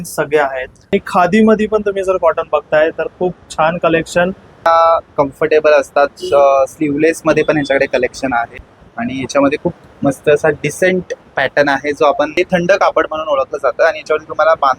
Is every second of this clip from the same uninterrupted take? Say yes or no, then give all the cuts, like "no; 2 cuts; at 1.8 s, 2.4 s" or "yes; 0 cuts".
no; 4 cuts; at 0.9 s, 4.7 s, 8.5 s, 12.3 s